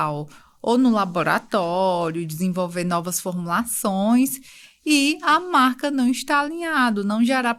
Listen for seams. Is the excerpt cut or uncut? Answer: uncut